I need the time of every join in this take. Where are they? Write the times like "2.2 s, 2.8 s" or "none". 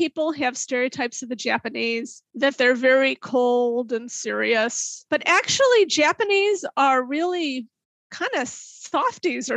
2.2 s, 4.9 s